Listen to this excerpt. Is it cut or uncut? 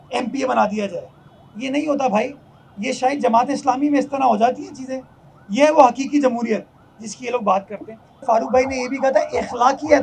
cut